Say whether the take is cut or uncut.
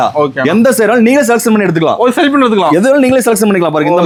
uncut